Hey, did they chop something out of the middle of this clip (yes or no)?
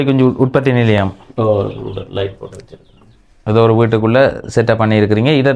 no